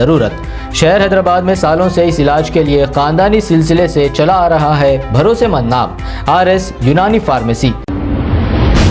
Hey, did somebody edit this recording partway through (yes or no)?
yes